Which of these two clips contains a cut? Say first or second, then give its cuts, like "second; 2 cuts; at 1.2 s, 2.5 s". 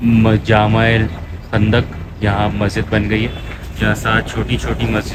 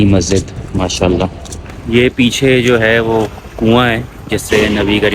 second; 1 cut; at 1.8 s